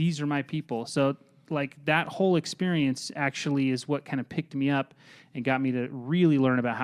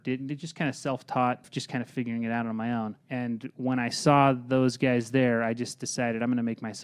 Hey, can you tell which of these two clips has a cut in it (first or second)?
second